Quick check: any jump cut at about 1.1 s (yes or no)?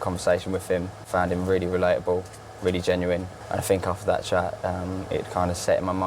yes